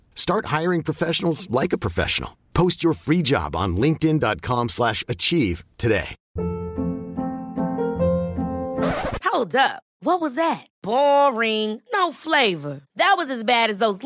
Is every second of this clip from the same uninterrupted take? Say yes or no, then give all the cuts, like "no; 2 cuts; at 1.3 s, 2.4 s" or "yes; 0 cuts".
yes; 0 cuts